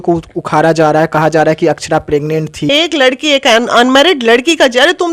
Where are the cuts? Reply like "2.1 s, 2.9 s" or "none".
2.7 s

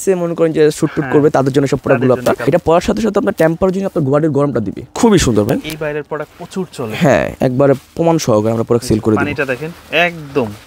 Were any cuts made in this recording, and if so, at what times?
2.4 s, 4.8 s, 7.3 s

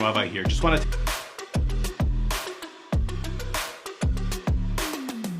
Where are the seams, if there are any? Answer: 0.9 s

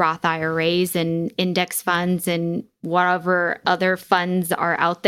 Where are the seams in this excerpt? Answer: 2.7 s

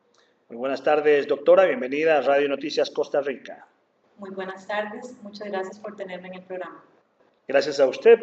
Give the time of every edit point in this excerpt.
none

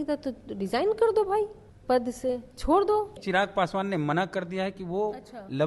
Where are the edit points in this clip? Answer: 1.7 s, 3.2 s

